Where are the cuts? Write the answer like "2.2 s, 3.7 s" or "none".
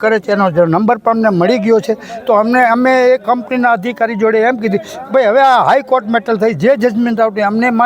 none